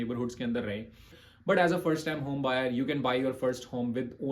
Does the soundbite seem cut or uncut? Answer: cut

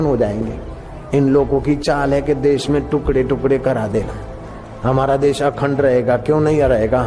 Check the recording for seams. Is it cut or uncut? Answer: uncut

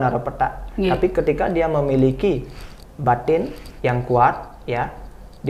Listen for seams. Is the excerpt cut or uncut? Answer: uncut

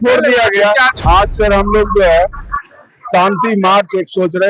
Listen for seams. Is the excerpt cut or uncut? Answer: cut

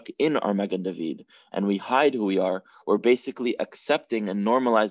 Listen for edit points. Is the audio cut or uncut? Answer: uncut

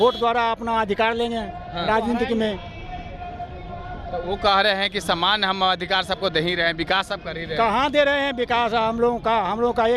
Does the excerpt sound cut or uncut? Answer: uncut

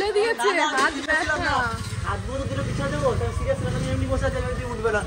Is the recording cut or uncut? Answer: uncut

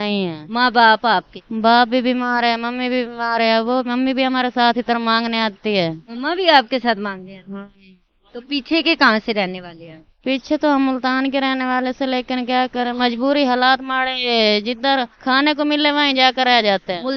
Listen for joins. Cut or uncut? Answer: uncut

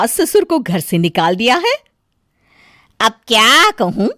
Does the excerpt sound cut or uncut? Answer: uncut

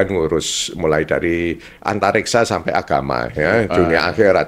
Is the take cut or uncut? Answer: uncut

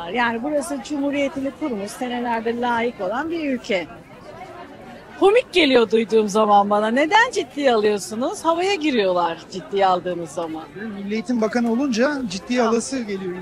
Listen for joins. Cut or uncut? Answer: uncut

